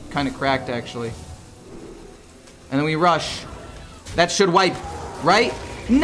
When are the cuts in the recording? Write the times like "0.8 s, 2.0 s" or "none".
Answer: none